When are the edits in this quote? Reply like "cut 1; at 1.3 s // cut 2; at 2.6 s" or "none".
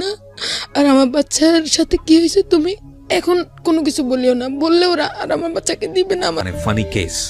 cut 1; at 6.4 s